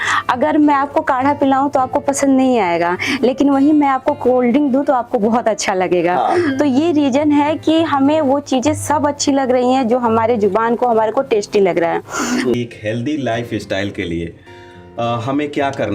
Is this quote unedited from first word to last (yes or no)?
no